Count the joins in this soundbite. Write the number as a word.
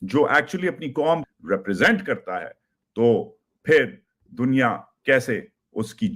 one